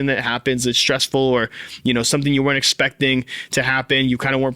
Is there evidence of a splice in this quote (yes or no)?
no